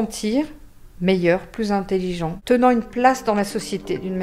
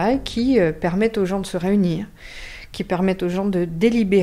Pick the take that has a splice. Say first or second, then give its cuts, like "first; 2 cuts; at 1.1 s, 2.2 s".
first; 1 cut; at 2.3 s